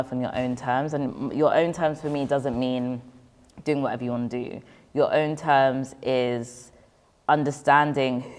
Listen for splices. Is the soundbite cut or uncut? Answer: uncut